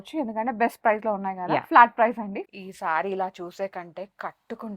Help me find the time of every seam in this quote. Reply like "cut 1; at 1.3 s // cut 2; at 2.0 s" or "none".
cut 1; at 2.4 s